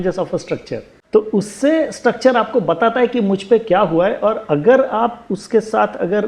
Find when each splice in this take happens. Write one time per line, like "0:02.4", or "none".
0:00.9